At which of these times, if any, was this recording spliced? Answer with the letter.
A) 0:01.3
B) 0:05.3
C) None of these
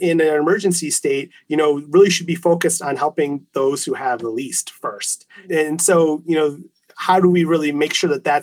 B